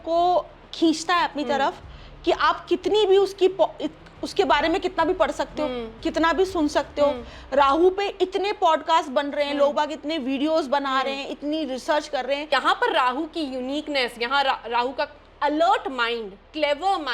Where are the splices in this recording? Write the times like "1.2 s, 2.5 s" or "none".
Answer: 12.5 s